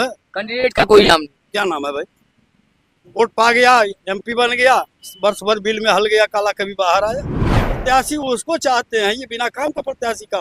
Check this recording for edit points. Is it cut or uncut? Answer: cut